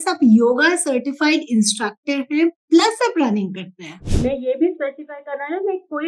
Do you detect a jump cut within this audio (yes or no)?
yes